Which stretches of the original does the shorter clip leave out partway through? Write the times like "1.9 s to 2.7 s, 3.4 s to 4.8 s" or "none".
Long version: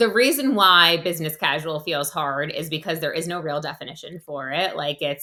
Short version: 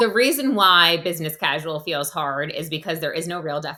none